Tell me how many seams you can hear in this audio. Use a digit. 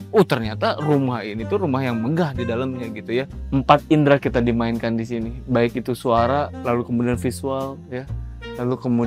1